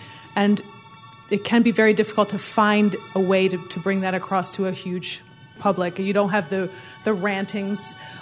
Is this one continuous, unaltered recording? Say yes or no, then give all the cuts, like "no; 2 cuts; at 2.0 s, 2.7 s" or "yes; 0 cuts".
no; 2 cuts; at 1.1 s, 5.6 s